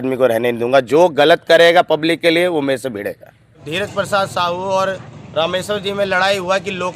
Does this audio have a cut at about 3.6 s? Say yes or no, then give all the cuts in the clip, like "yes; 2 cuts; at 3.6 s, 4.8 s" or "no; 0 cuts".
yes; 1 cut; at 3.6 s